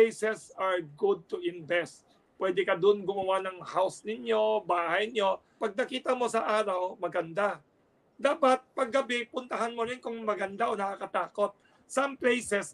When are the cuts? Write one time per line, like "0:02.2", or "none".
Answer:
0:05.6